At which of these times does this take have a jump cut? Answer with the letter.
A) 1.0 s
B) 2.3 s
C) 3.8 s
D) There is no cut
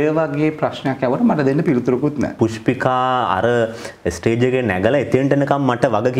B